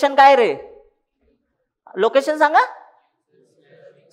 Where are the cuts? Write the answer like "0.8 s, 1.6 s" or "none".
none